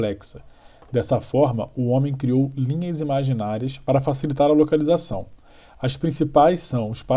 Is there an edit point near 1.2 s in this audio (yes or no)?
no